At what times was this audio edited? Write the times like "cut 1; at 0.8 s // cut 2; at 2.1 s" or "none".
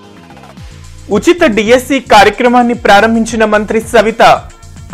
cut 1; at 1.0 s